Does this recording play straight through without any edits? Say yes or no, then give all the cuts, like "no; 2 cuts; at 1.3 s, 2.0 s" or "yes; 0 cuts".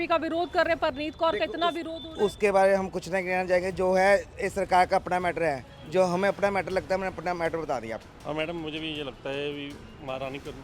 no; 1 cut; at 8.0 s